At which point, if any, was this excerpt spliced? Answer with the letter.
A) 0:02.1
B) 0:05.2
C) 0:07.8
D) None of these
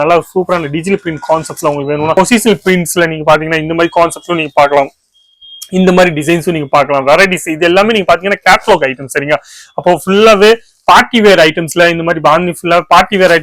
A